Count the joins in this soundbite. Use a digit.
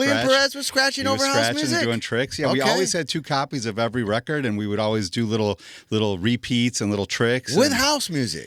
0